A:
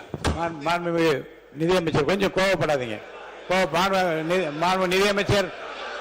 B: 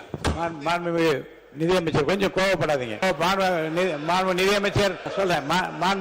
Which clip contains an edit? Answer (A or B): B